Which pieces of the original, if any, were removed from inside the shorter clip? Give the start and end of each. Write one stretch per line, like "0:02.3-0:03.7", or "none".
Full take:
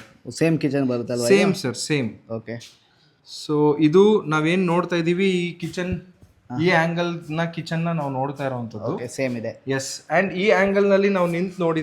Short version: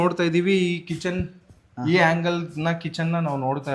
none

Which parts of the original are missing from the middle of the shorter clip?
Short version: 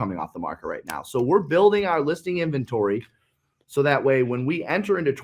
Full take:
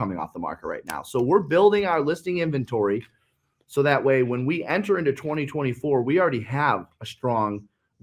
none

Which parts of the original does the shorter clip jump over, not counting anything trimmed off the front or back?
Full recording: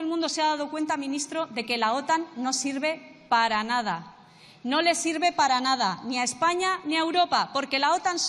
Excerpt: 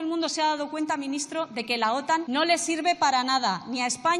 0:02.2-0:04.6

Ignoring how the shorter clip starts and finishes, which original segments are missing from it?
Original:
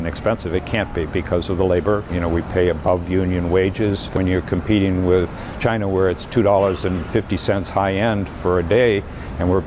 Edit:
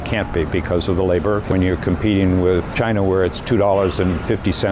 0:02.0-0:04.1
0:05.4-0:05.6

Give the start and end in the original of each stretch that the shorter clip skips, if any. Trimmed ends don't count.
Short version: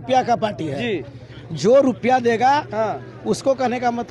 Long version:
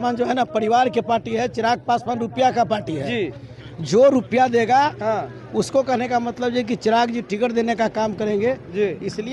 none

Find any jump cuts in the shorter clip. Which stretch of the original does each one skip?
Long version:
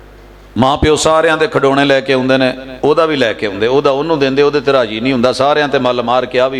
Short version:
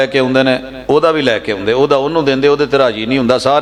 none

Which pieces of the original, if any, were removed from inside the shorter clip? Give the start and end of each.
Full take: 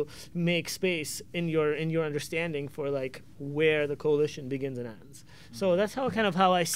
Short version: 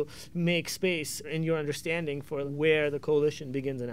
0:01.3-0:01.8
0:02.9-0:03.4

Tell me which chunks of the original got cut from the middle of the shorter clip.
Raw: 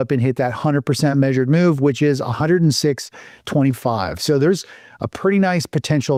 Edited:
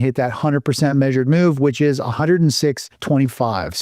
0:03.1-0:03.4

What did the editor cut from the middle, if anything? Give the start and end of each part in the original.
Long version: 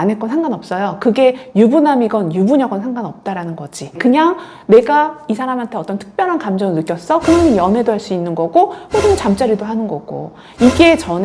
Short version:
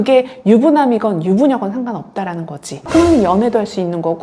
0:04.0-0:07.2

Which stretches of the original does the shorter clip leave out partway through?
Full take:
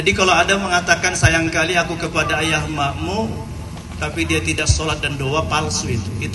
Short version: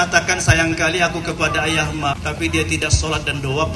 0:02.9-0:03.9

